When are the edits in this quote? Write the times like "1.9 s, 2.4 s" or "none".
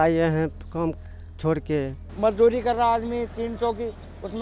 2.0 s